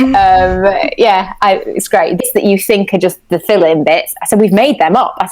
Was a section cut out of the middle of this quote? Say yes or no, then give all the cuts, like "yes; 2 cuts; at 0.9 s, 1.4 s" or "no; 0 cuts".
yes; 1 cut; at 2.2 s